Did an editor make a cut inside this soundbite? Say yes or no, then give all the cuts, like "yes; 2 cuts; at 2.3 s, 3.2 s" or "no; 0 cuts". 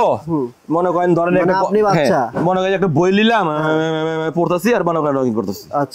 no; 0 cuts